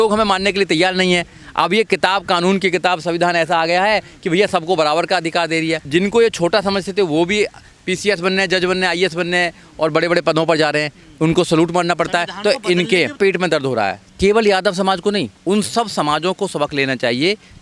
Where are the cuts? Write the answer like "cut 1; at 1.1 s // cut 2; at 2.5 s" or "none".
cut 1; at 14.0 s // cut 2; at 15.3 s